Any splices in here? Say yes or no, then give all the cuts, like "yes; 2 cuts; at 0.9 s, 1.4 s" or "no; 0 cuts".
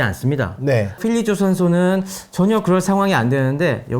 yes; 1 cut; at 0.9 s